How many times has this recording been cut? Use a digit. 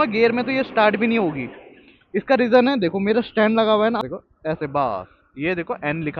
1